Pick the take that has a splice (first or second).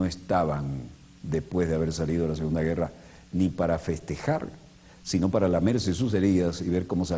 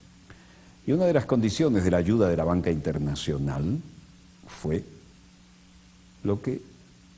second